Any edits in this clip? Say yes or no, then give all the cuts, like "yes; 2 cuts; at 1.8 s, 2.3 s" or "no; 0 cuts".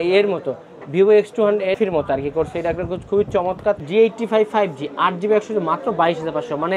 yes; 2 cuts; at 1.8 s, 3.8 s